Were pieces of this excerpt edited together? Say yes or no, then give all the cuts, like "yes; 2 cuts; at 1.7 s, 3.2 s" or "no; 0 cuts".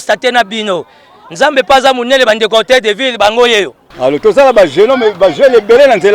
yes; 1 cut; at 3.8 s